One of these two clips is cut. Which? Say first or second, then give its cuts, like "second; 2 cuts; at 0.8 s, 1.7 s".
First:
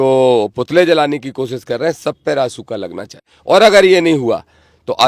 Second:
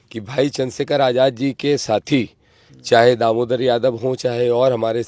first; 1 cut; at 3.3 s